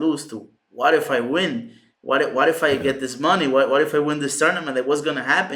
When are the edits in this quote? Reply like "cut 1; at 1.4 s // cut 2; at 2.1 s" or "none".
none